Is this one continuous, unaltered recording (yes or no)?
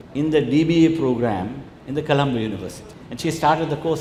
yes